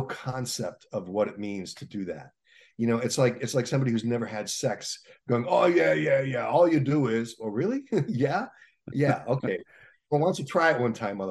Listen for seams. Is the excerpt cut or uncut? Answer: uncut